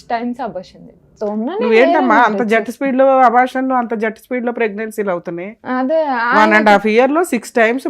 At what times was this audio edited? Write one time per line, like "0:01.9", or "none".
0:01.1